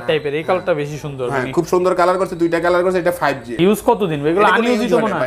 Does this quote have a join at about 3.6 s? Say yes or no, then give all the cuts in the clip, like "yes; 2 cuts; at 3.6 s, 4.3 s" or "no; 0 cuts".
yes; 1 cut; at 3.6 s